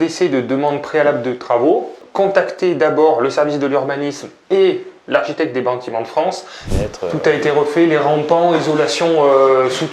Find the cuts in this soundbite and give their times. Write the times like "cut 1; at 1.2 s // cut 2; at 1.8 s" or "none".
cut 1; at 2.0 s // cut 2; at 6.6 s